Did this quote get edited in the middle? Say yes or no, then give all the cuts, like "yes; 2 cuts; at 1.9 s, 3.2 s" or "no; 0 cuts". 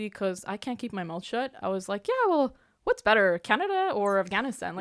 no; 0 cuts